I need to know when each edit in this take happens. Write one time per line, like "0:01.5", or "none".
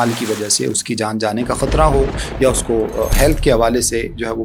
none